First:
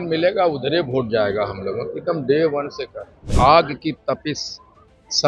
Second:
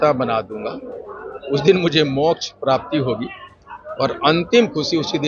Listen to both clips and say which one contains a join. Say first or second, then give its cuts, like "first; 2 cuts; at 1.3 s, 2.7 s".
first; 1 cut; at 3.3 s